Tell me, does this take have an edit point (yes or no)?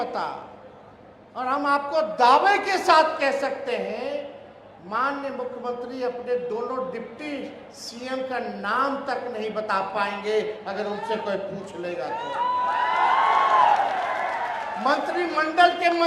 no